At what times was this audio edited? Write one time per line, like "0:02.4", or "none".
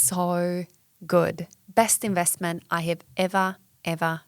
none